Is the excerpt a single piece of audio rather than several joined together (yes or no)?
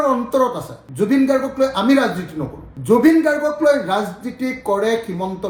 yes